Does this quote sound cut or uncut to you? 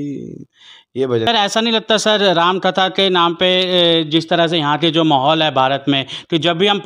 cut